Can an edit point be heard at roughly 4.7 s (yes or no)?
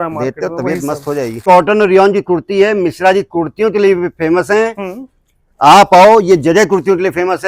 no